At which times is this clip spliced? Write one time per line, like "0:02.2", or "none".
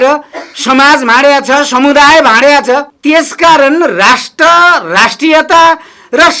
0:02.9